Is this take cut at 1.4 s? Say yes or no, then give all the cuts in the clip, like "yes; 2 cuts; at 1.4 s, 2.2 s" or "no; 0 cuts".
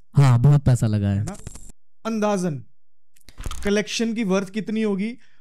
yes; 1 cut; at 1.4 s